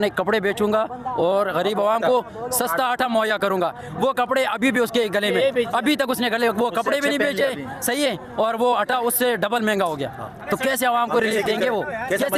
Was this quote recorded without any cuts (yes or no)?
yes